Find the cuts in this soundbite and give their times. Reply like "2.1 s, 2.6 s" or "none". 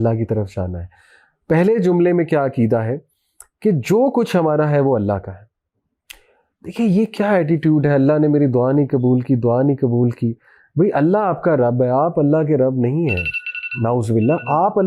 none